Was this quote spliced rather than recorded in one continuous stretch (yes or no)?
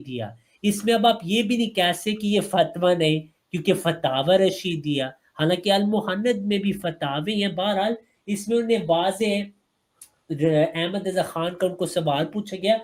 no